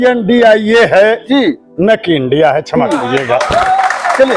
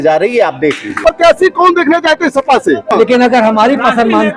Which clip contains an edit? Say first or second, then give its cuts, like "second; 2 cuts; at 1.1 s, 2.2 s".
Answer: second; 2 cuts; at 1.0 s, 2.9 s